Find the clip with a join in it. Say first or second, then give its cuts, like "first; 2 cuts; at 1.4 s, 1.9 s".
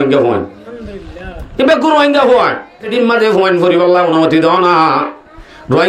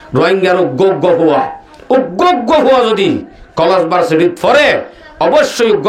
first; 1 cut; at 2.9 s